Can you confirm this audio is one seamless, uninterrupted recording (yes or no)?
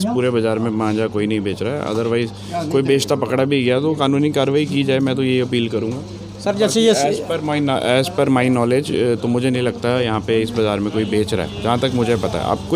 yes